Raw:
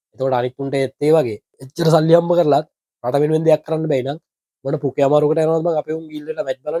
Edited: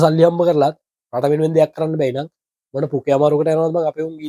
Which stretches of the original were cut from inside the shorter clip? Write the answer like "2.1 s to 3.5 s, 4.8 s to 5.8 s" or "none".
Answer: none